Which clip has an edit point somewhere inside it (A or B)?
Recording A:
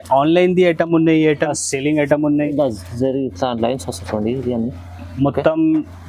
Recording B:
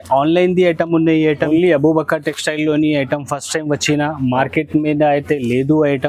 A